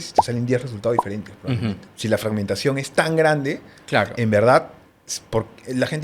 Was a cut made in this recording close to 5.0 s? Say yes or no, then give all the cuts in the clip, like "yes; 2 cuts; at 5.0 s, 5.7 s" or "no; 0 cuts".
no; 1 cut; at 1.9 s